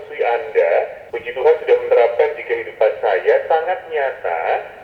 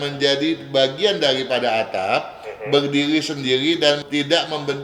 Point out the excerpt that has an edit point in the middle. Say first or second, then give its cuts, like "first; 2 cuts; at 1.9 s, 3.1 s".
first; 1 cut; at 1.0 s